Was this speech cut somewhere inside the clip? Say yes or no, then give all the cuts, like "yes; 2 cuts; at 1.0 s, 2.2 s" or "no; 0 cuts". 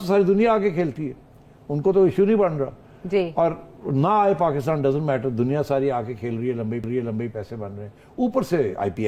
no; 0 cuts